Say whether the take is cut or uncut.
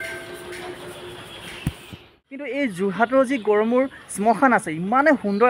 cut